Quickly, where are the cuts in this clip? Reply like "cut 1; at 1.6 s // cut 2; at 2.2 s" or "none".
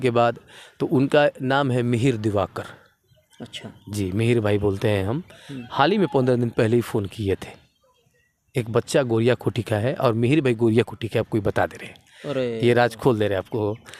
none